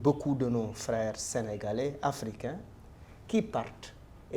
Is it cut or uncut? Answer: uncut